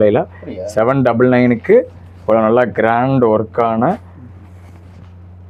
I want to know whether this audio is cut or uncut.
uncut